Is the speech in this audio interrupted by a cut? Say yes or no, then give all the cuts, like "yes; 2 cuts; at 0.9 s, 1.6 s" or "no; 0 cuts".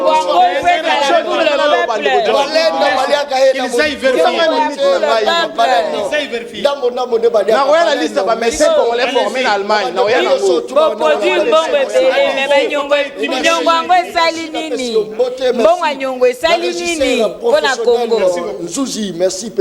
no; 0 cuts